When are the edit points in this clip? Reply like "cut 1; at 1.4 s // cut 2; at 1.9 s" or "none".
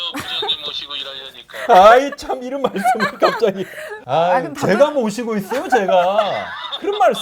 none

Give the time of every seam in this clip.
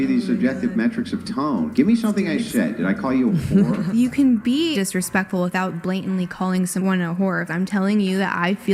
cut 1; at 1.6 s

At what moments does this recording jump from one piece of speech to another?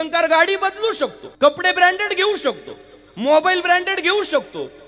cut 1; at 1.2 s

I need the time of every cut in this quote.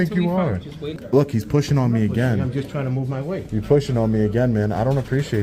cut 1; at 1.0 s

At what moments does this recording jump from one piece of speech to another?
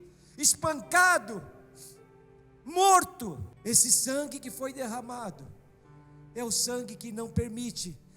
cut 1; at 3.5 s

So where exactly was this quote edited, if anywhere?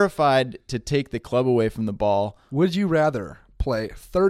cut 1; at 2.4 s // cut 2; at 3.3 s

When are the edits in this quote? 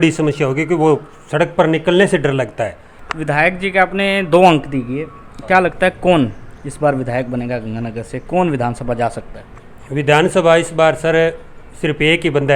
cut 1; at 2.9 s

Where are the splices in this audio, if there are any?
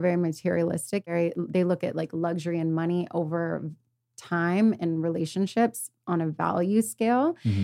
cut 1; at 1.1 s

